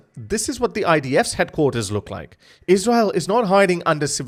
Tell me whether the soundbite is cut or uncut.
uncut